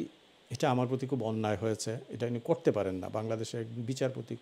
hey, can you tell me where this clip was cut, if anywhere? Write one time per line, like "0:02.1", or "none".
none